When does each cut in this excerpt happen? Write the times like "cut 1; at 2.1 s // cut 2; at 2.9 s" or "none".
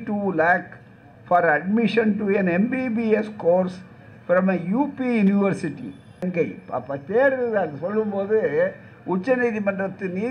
cut 1; at 6.3 s